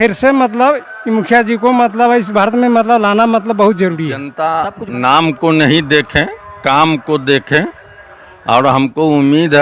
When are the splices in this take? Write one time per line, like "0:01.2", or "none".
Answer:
0:04.3

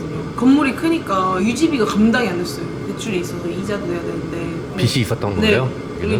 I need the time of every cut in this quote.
none

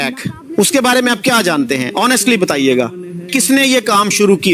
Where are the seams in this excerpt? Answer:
0:03.3

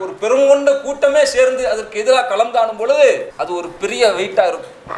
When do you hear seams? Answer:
0:03.3

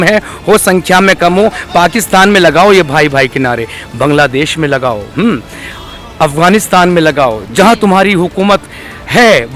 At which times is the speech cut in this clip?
none

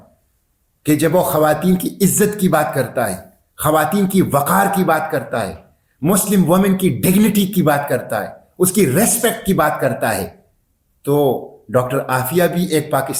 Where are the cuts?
none

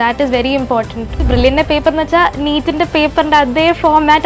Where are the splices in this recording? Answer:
0:01.3

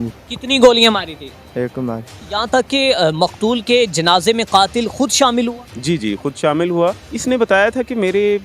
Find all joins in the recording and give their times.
0:02.2
0:07.1

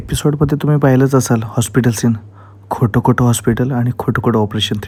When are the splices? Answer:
none

